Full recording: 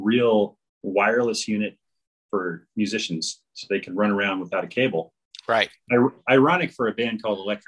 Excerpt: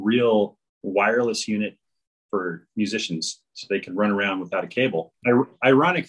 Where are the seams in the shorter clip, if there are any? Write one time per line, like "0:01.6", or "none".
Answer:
0:05.1